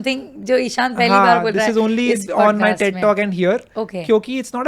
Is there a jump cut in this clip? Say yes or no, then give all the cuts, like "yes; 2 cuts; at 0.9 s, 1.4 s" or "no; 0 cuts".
no; 0 cuts